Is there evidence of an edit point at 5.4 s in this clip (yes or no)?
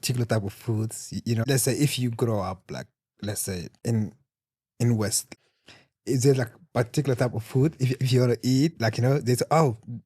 yes